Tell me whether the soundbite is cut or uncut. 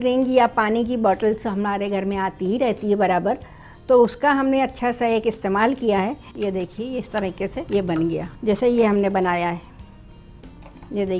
cut